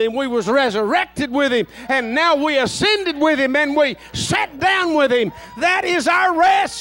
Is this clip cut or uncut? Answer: uncut